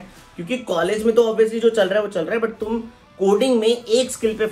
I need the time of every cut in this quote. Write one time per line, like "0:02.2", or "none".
none